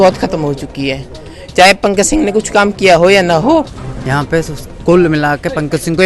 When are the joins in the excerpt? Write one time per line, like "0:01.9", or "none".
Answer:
0:03.7